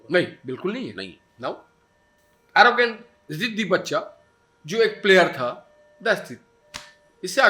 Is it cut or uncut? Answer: uncut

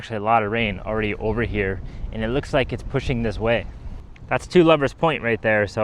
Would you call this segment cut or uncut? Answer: uncut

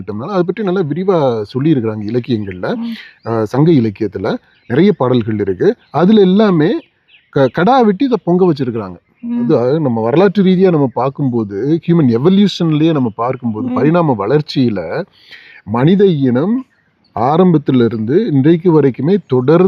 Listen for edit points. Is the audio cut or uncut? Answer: cut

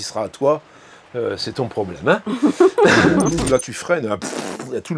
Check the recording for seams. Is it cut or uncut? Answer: cut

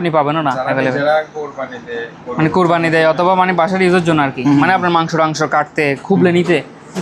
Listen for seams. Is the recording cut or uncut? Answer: uncut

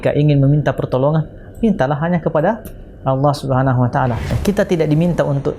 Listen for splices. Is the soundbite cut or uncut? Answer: cut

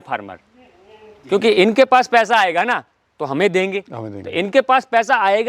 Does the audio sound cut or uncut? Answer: uncut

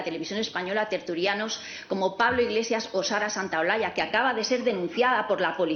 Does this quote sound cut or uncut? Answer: uncut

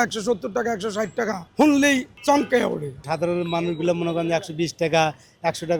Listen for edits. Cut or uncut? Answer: cut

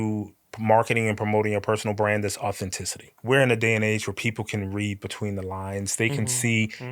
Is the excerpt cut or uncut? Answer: cut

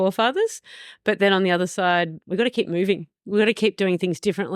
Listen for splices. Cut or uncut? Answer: uncut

